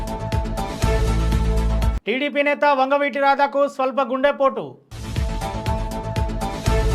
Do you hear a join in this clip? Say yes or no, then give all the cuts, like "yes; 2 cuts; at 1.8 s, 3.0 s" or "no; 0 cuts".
yes; 1 cut; at 2.0 s